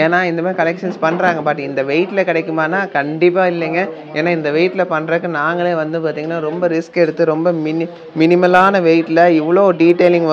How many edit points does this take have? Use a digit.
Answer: 0